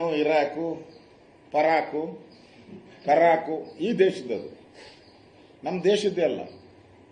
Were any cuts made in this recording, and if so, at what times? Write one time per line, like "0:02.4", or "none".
none